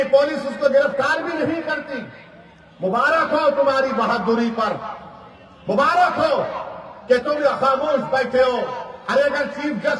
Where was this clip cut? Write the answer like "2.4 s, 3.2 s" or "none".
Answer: none